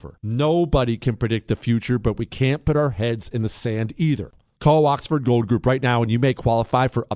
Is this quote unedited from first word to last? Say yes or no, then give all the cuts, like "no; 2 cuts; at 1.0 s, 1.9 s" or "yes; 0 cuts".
no; 1 cut; at 4.3 s